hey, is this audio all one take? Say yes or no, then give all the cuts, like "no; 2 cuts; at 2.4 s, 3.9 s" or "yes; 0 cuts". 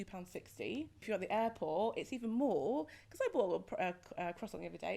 no; 1 cut; at 1.0 s